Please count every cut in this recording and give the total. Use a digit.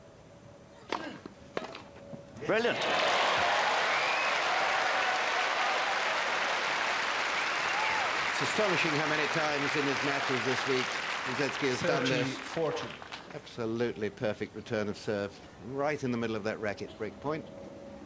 0